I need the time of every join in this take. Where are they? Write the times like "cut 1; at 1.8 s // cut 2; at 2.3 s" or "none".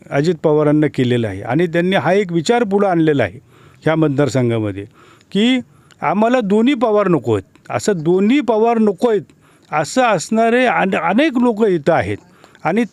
none